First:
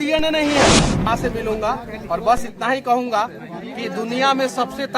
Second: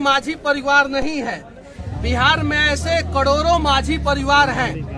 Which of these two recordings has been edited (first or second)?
first